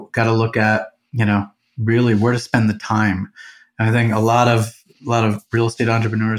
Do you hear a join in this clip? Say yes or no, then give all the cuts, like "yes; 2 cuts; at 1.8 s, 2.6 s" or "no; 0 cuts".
no; 0 cuts